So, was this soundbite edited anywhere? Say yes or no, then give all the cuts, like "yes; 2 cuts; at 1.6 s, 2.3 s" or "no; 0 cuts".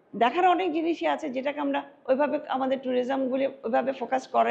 no; 0 cuts